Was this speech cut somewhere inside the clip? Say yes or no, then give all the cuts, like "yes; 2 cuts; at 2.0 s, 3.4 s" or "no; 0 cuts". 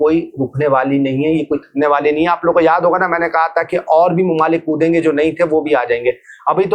no; 0 cuts